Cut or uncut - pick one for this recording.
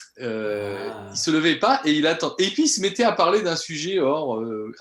uncut